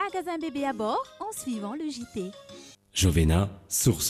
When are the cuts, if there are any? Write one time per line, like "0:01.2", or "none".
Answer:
0:02.8